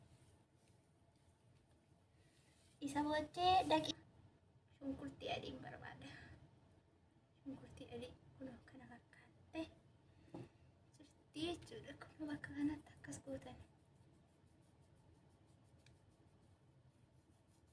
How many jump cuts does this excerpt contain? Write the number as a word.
one